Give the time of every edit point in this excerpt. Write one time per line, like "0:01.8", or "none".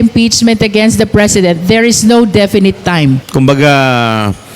0:03.3